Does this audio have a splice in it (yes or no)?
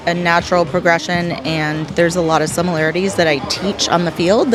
no